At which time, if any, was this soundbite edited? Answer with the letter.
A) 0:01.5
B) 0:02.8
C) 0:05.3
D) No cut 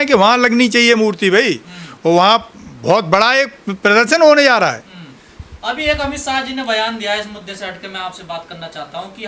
D